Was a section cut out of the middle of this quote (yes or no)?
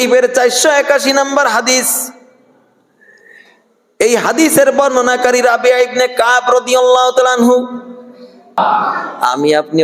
yes